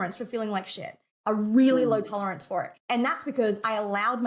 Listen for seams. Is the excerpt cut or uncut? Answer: uncut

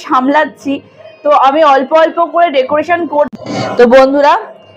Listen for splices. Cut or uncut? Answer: cut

